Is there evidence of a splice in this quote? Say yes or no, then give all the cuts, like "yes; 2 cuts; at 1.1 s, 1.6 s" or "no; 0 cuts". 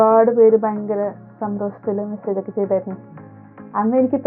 no; 0 cuts